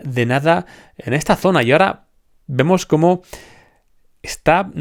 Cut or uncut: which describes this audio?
uncut